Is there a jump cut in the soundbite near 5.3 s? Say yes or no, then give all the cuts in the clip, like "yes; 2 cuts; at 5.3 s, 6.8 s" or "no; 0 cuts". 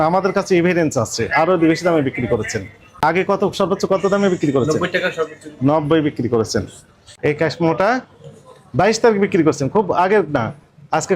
no; 2 cuts; at 3.0 s, 7.1 s